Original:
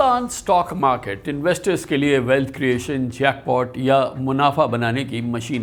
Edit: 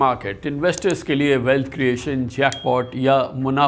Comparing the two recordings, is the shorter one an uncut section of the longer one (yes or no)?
yes